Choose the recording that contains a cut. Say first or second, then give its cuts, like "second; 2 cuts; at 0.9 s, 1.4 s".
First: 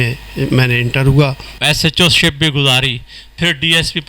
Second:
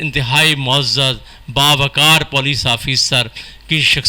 first; 1 cut; at 1.5 s